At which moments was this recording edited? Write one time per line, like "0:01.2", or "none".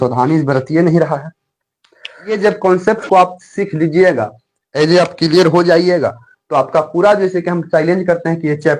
0:02.3